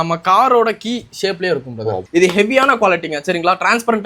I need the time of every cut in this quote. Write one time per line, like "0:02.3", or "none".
0:02.1

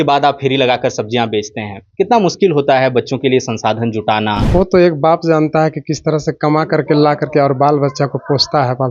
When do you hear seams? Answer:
0:04.4

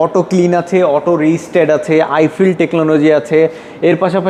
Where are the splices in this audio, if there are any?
none

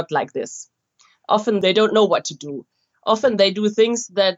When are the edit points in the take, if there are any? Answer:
0:01.6

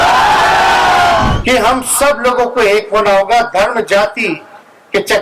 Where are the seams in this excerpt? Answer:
0:01.3

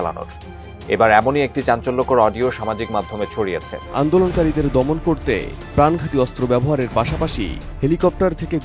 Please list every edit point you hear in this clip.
0:03.8

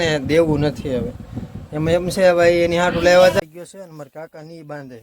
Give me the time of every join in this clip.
0:03.4

